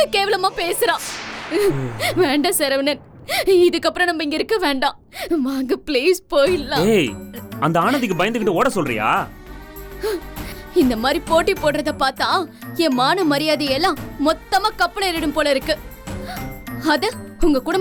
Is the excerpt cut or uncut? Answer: uncut